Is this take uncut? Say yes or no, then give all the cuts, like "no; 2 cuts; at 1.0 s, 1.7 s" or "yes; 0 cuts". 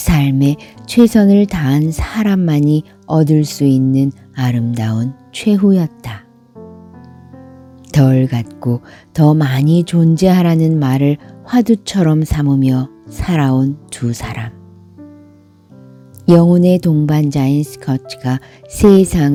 yes; 0 cuts